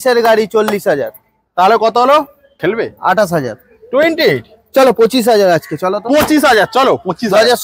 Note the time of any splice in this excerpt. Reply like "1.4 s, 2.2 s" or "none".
2.5 s